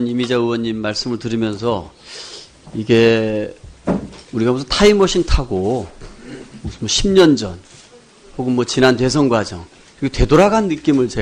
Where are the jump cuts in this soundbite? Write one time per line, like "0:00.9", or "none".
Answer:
none